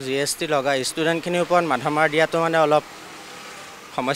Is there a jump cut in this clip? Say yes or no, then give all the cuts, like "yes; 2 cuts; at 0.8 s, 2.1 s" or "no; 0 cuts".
no; 0 cuts